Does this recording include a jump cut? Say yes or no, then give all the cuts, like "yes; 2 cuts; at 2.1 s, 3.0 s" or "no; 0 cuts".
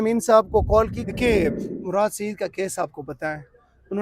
yes; 1 cut; at 1.0 s